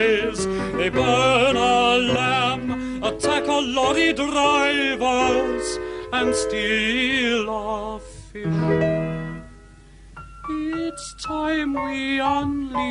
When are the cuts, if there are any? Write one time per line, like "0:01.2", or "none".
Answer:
none